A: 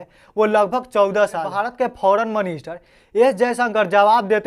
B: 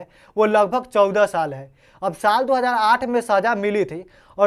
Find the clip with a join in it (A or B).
A